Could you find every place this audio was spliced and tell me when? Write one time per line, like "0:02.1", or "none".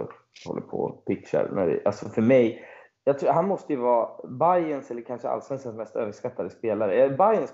0:02.8